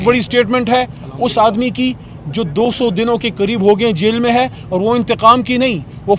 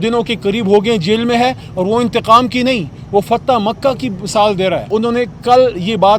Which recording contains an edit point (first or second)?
second